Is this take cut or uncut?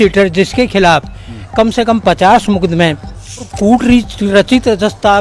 cut